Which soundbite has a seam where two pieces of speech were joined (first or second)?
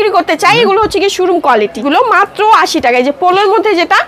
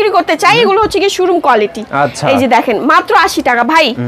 first